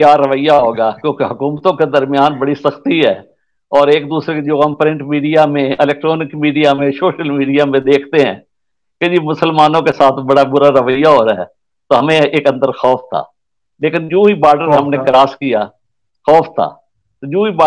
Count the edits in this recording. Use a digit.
0